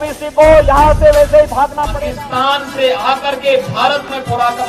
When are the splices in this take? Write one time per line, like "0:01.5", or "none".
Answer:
0:01.8